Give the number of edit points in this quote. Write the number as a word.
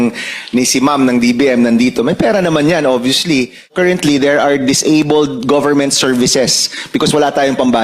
one